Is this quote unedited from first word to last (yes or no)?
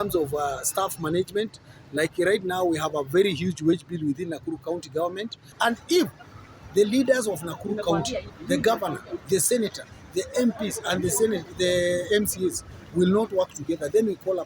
no